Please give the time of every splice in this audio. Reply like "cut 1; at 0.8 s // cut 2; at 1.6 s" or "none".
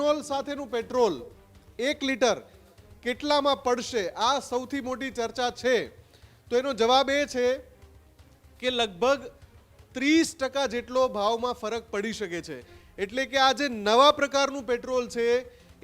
none